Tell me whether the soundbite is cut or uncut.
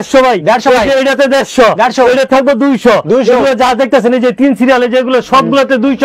uncut